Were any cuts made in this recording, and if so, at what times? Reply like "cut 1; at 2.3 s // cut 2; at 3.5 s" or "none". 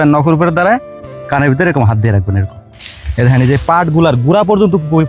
cut 1; at 2.7 s